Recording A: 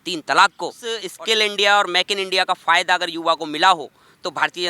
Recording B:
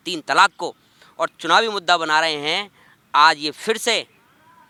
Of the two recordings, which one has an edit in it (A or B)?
A